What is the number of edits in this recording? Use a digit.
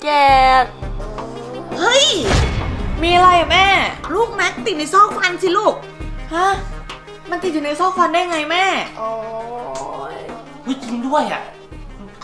0